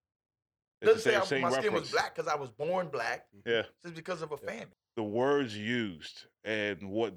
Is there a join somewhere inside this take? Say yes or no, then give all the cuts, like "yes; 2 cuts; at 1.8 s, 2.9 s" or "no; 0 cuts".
yes; 1 cut; at 4.7 s